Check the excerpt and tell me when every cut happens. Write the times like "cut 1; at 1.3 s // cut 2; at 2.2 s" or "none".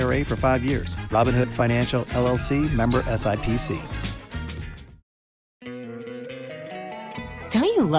cut 1; at 5.6 s